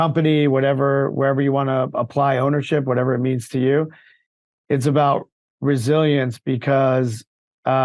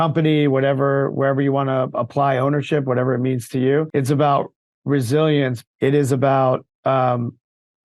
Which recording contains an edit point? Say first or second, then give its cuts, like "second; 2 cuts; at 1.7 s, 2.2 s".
second; 2 cuts; at 3.9 s, 5.6 s